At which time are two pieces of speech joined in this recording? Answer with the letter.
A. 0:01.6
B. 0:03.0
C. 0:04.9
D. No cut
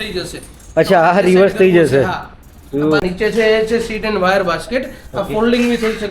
B